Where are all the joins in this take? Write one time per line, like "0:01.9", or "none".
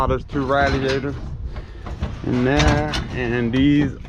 none